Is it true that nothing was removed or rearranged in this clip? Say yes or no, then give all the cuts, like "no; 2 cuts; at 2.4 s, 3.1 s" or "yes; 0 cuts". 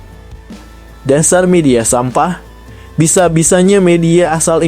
no; 1 cut; at 1.0 s